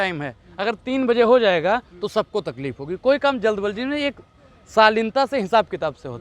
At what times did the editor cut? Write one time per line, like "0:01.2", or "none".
none